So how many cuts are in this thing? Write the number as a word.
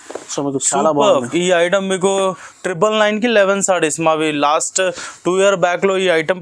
one